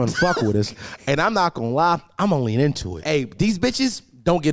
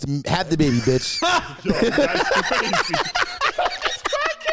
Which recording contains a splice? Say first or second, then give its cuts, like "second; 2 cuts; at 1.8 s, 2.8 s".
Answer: first; 1 cut; at 3.0 s